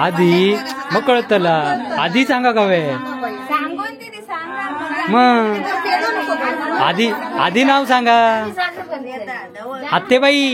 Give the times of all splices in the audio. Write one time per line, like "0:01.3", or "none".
none